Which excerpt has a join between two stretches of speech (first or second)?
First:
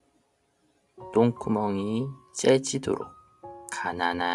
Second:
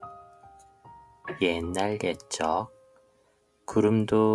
second